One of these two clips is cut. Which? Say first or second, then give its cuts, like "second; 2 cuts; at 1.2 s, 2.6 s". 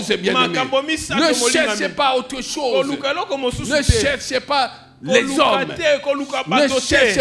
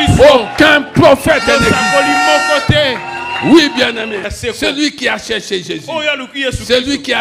second; 1 cut; at 4.2 s